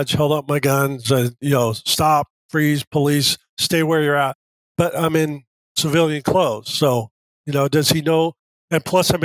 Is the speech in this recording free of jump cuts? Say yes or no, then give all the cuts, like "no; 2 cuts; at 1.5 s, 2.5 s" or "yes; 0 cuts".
yes; 0 cuts